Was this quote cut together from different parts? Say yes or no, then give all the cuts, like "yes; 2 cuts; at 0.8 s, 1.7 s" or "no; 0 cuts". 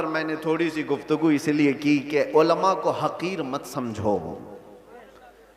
no; 0 cuts